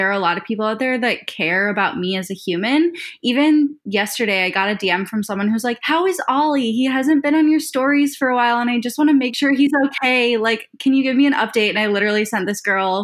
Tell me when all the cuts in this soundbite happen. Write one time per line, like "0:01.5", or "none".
none